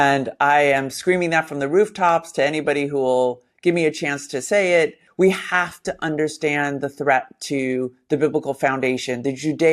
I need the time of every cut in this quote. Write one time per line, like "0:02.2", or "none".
0:05.0